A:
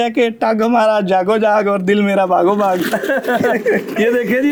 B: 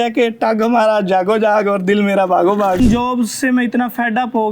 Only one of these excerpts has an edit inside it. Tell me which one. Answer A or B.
B